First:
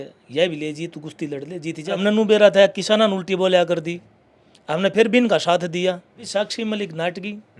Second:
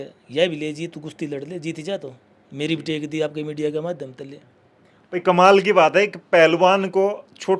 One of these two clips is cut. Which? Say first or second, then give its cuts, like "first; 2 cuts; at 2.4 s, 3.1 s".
first; 2 cuts; at 2.0 s, 6.1 s